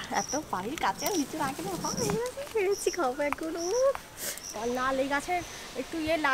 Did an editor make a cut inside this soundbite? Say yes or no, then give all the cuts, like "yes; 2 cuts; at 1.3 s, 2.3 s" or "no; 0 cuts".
yes; 1 cut; at 4.5 s